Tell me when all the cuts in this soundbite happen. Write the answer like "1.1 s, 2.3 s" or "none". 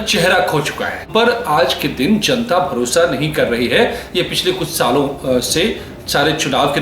1.1 s